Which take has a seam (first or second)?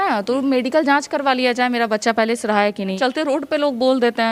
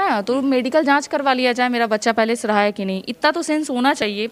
first